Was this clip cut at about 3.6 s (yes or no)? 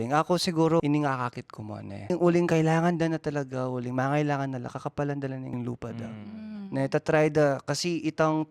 no